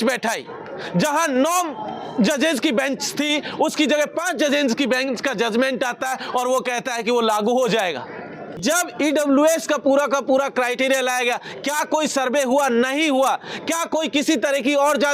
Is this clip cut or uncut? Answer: cut